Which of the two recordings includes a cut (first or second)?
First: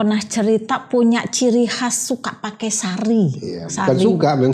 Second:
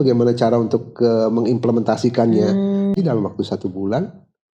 second